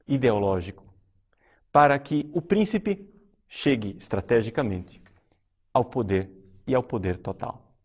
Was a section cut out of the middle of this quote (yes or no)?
no